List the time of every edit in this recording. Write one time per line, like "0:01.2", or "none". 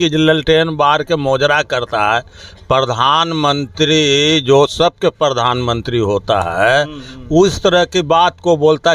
none